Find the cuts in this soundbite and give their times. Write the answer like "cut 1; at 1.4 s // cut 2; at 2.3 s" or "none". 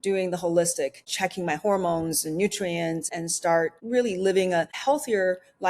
cut 1; at 1.1 s // cut 2; at 3.7 s